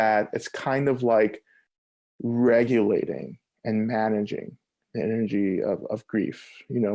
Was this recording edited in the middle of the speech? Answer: no; 0 cuts

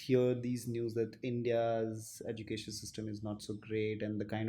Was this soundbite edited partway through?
no; 0 cuts

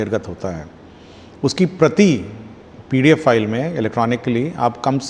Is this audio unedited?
yes; 0 cuts

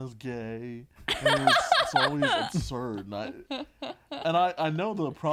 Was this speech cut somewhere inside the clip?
no; 0 cuts

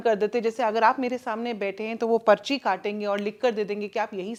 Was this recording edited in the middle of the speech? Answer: no; 0 cuts

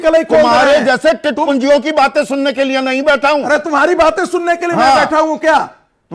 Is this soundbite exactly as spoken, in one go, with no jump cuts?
yes; 0 cuts

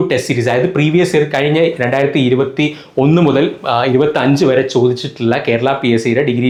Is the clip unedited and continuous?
yes; 0 cuts

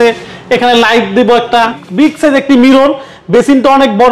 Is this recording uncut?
no; 1 cut; at 1.8 s

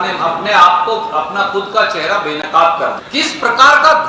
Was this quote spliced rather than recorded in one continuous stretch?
yes; 1 cut; at 3.0 s

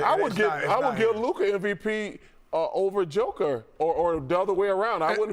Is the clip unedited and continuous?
yes; 0 cuts

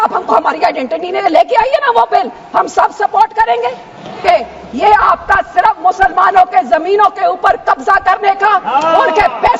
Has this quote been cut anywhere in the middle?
yes; 1 cut; at 4.2 s

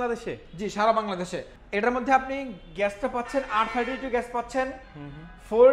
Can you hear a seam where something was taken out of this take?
no; 0 cuts

